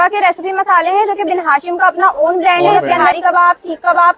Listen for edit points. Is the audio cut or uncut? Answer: cut